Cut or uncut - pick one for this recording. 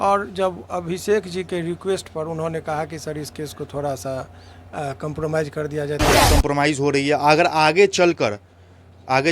cut